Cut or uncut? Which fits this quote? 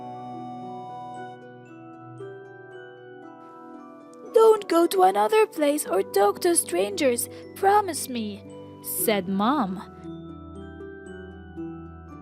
cut